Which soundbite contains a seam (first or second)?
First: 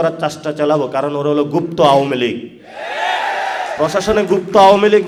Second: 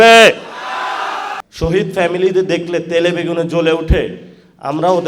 second